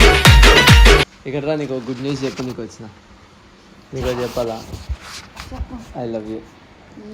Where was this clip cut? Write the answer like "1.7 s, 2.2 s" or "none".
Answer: 1.2 s